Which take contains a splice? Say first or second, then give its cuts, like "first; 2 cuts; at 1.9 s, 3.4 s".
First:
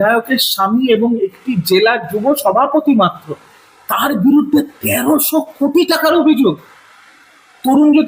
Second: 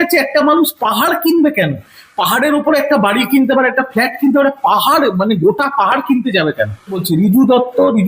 second; 1 cut; at 7.0 s